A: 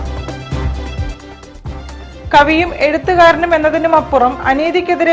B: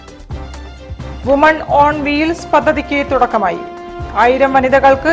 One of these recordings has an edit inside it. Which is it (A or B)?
A